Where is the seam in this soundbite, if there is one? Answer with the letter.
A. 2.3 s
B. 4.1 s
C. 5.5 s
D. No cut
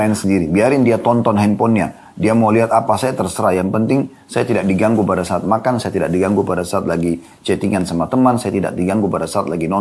D